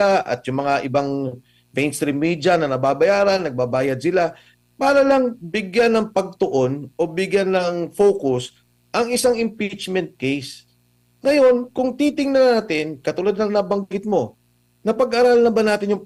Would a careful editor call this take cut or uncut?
uncut